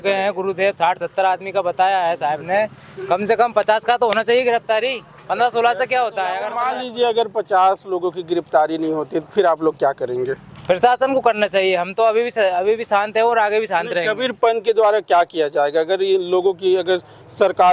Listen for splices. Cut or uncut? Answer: cut